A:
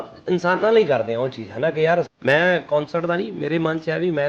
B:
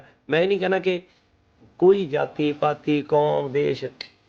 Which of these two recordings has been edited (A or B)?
A